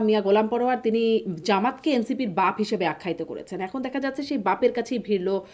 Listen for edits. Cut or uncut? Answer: uncut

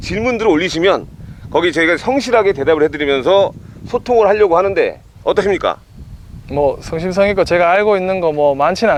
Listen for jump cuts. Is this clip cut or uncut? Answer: uncut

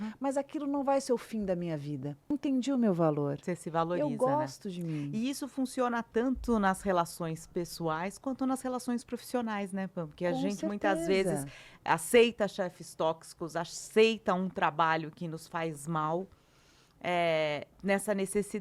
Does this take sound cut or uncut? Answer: cut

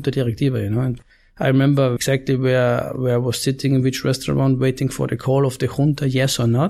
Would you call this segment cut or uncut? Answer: cut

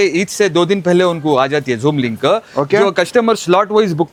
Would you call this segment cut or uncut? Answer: uncut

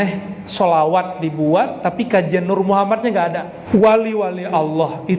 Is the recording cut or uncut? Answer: cut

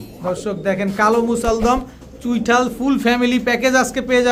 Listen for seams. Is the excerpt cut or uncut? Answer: uncut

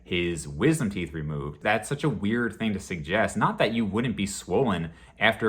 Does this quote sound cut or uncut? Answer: cut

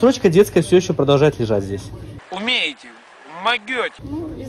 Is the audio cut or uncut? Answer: uncut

